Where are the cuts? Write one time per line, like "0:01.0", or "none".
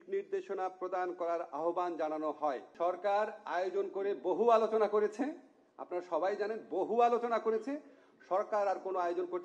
0:02.7